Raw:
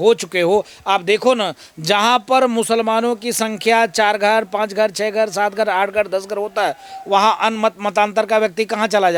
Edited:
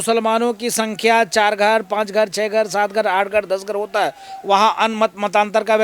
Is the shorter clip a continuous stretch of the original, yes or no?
yes